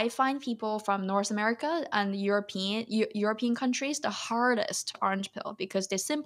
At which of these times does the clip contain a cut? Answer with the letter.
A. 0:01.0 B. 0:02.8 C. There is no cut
C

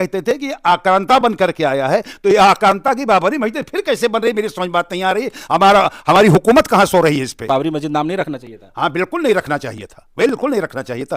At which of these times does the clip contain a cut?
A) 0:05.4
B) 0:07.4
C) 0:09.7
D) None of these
B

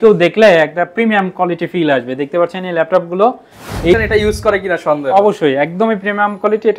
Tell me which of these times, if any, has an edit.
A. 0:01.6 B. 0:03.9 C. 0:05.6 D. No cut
B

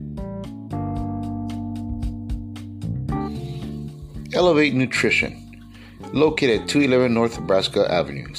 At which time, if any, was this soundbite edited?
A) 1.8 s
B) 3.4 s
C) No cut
B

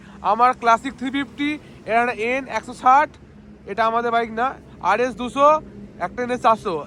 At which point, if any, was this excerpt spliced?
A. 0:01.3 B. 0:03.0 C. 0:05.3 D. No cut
D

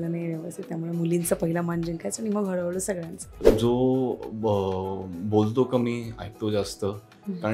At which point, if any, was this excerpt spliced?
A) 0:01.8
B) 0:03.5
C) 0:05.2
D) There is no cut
B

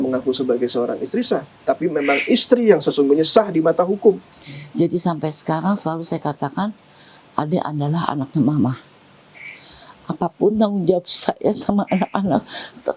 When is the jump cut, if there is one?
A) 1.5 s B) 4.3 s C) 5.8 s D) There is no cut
B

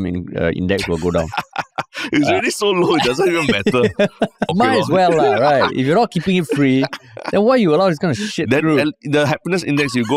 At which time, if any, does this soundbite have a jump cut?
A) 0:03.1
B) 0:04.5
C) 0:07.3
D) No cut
B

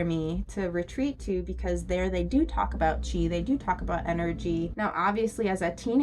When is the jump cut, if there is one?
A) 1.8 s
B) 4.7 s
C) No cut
B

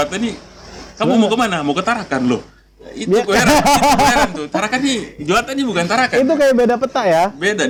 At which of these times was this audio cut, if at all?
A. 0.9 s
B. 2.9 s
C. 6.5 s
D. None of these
D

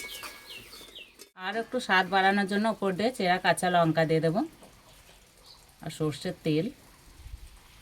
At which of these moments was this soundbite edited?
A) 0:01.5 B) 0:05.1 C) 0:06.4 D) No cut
A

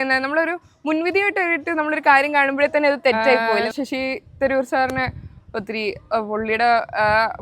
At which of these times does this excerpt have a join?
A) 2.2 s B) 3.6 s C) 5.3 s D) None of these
B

